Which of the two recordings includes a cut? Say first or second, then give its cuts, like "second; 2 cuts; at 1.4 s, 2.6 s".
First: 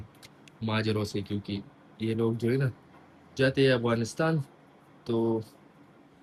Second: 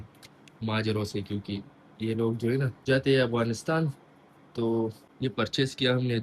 second; 2 cuts; at 2.7 s, 5.1 s